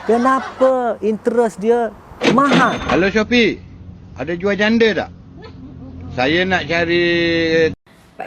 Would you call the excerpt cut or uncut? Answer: cut